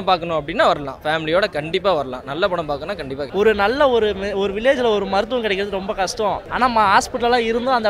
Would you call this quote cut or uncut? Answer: cut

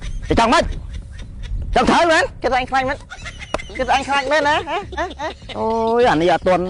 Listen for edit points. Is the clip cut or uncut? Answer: cut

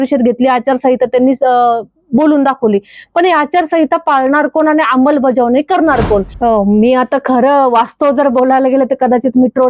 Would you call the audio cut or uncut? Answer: cut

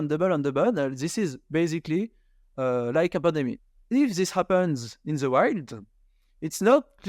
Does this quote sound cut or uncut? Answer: cut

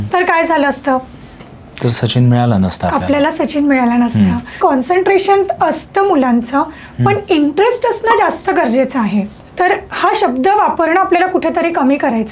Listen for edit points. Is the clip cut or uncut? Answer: cut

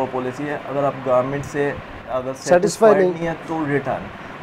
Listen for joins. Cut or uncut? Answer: uncut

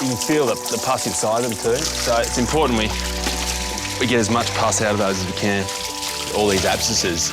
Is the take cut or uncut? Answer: cut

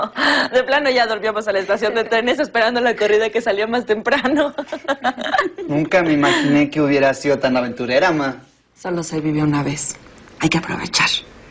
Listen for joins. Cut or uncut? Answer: cut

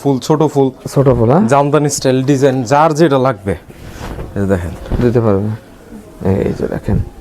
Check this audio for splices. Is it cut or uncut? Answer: uncut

